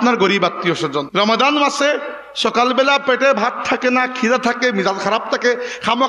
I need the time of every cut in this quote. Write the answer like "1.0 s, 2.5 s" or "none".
1.1 s